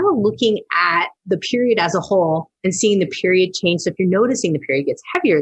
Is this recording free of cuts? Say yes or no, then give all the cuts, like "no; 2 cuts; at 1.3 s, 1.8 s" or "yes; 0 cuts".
yes; 0 cuts